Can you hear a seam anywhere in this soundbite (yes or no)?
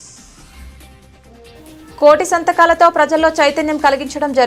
no